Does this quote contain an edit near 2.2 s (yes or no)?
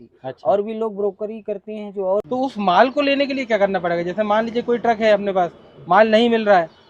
yes